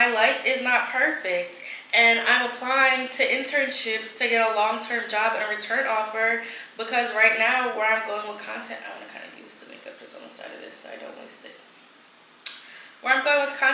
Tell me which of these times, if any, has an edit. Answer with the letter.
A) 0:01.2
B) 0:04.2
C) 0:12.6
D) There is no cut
D